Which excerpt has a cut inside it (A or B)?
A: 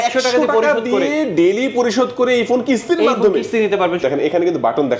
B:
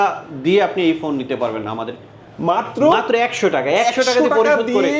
A